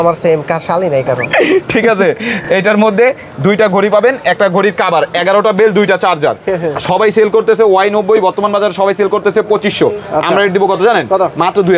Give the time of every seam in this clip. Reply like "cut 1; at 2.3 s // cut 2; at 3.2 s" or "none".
none

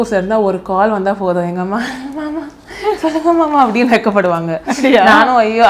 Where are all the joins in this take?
none

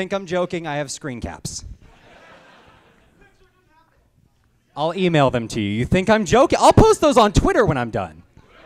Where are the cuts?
cut 1; at 7.4 s

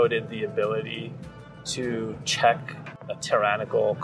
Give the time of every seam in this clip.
cut 1; at 2.9 s

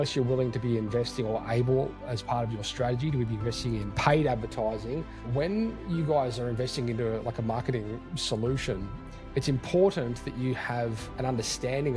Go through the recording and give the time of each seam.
cut 1; at 2.1 s // cut 2; at 3.9 s // cut 3; at 5.2 s

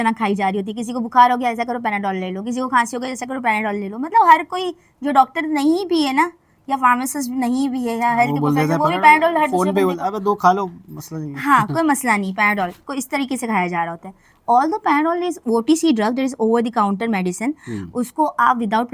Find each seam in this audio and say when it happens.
none

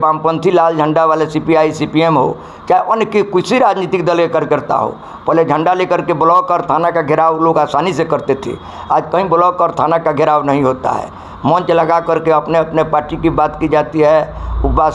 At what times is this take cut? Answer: none

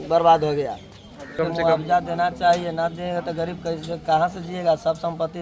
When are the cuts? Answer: cut 1; at 1.4 s

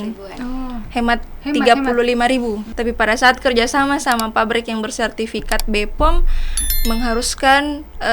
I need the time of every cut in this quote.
cut 1; at 2.7 s

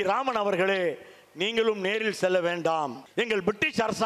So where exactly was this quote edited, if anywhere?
cut 1; at 3.0 s

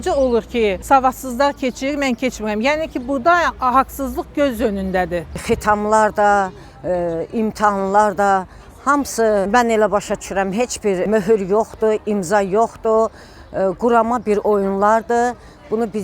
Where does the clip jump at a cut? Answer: cut 1; at 0.8 s // cut 2; at 5.4 s // cut 3; at 9.5 s // cut 4; at 11.0 s

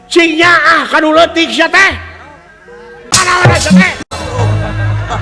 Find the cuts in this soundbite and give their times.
cut 1; at 3.0 s // cut 2; at 4.0 s

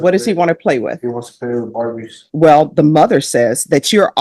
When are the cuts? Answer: cut 1; at 2.2 s

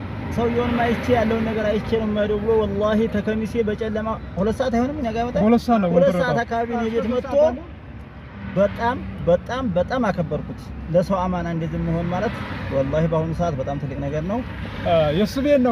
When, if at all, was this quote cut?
cut 1; at 14.5 s

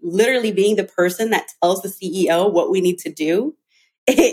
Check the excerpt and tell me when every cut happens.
none

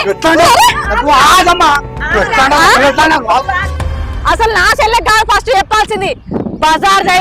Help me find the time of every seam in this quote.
cut 1; at 4.0 s

